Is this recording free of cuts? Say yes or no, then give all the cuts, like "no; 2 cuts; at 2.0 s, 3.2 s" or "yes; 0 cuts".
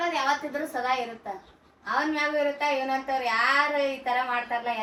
yes; 0 cuts